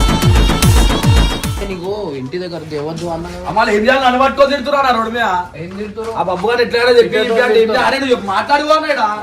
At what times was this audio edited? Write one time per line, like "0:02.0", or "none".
0:01.6

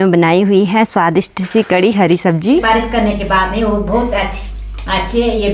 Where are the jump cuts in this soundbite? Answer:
0:02.6

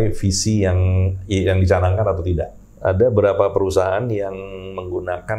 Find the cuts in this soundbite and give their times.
0:02.6

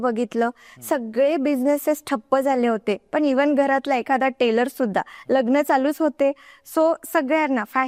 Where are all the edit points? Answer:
none

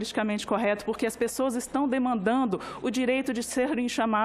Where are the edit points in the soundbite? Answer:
none

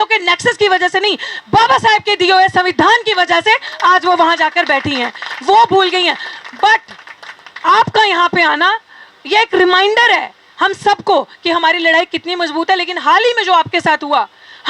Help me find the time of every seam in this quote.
none

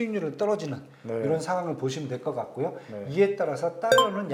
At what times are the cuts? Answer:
none

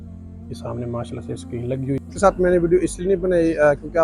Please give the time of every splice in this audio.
0:02.1

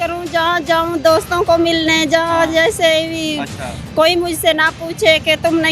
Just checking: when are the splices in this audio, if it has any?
none

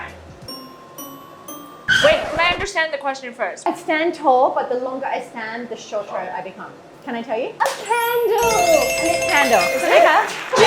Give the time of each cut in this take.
0:03.7
0:07.5

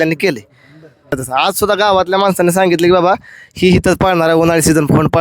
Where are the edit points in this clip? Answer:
0:01.1

